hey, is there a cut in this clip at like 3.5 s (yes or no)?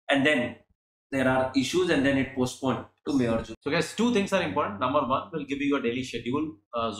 yes